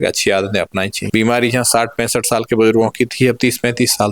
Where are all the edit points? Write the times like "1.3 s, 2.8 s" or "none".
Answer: 1.0 s